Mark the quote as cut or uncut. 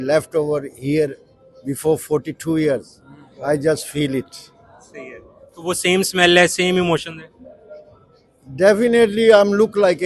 uncut